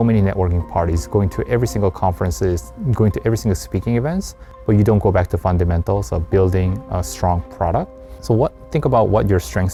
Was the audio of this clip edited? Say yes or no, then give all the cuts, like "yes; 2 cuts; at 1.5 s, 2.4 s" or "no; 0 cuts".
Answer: no; 0 cuts